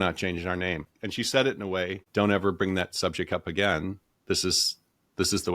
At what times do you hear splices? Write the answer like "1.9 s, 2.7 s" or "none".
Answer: 1.0 s, 2.0 s